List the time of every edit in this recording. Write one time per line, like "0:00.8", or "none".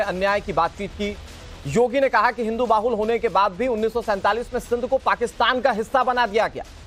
0:02.7